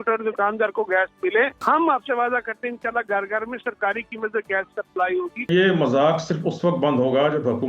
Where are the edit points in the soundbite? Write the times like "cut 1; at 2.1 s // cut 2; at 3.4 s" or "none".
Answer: cut 1; at 1.6 s // cut 2; at 5.5 s